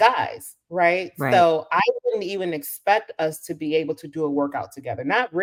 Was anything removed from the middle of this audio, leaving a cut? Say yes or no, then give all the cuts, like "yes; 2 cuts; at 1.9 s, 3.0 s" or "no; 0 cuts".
no; 0 cuts